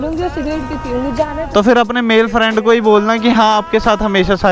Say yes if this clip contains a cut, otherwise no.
yes